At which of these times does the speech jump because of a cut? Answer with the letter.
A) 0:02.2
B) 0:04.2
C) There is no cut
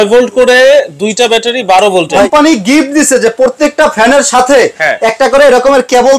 A